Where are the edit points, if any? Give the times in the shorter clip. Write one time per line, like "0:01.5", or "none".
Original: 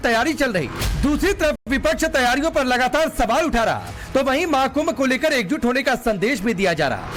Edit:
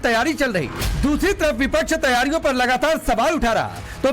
0:01.6